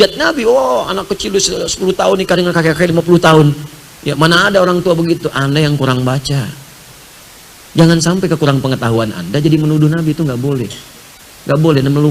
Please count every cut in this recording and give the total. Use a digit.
0